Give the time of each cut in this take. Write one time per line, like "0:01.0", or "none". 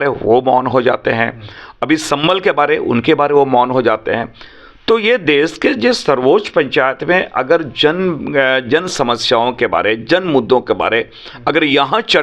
none

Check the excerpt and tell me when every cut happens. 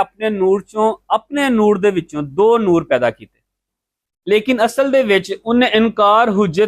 0:03.6

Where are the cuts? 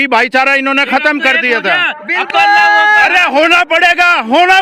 none

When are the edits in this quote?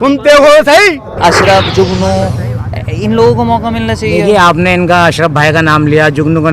0:01.1

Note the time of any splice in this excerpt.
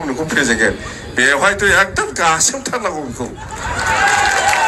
none

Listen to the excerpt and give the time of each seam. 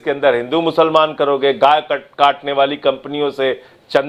none

